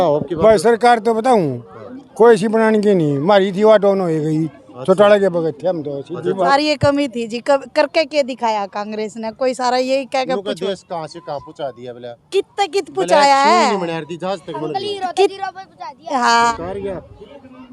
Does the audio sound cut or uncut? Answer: cut